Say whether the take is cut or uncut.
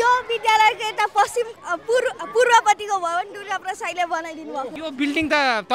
cut